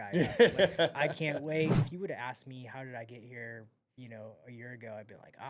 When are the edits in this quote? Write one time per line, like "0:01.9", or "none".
0:01.9